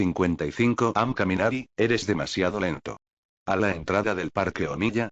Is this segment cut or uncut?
cut